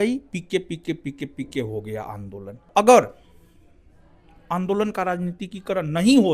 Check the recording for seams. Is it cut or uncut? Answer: cut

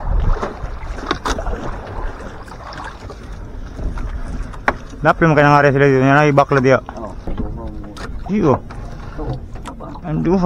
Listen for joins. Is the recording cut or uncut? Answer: cut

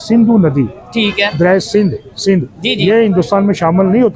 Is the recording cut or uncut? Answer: uncut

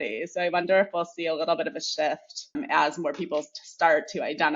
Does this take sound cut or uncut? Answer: uncut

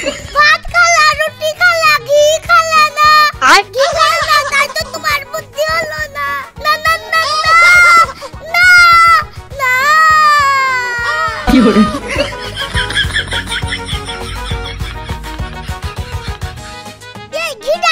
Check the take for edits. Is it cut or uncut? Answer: uncut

